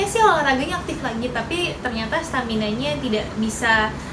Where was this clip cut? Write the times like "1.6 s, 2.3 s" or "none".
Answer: none